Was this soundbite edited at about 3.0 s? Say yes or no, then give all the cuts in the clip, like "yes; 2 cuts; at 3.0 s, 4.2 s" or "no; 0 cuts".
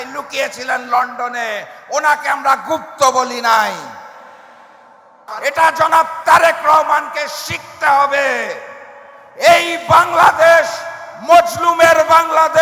no; 1 cut; at 5.3 s